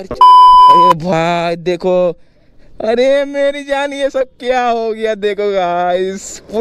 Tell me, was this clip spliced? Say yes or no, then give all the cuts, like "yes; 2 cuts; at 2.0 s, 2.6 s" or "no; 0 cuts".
yes; 1 cut; at 0.9 s